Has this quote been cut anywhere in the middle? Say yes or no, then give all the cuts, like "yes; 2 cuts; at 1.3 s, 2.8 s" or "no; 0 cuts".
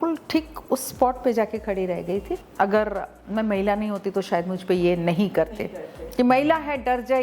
yes; 1 cut; at 2.4 s